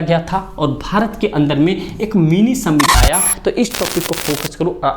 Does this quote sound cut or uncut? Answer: cut